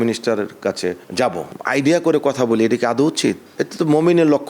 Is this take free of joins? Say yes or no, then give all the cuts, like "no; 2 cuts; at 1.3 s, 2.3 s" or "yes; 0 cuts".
no; 1 cut; at 1.5 s